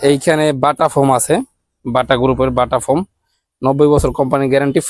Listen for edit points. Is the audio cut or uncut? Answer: uncut